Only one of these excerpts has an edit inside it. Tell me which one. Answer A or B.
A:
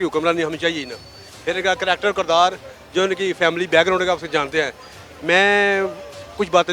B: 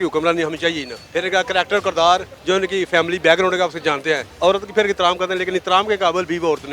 B